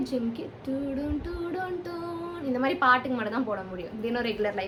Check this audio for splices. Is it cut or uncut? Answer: uncut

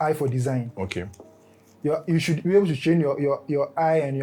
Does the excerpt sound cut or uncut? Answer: uncut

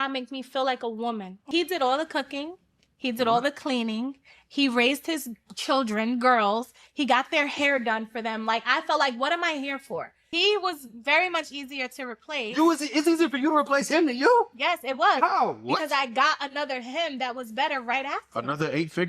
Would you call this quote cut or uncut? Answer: cut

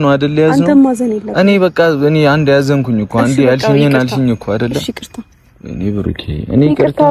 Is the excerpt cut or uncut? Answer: uncut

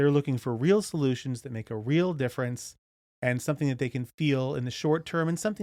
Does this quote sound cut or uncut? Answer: uncut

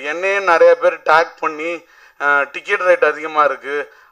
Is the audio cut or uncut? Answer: uncut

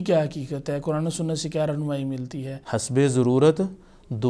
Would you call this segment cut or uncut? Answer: cut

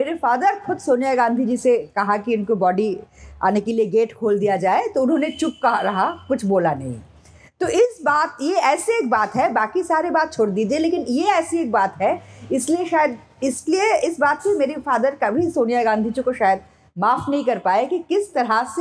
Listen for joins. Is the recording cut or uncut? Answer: uncut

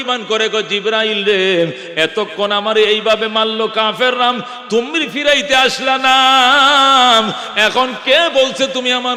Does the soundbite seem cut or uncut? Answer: uncut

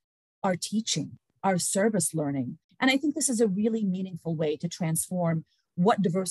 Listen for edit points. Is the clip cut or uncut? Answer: cut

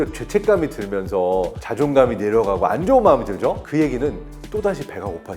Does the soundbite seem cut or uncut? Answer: cut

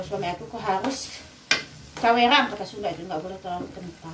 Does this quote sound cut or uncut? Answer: uncut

